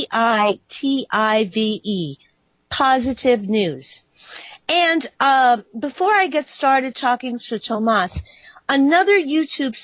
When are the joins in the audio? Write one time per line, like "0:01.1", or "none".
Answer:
0:05.3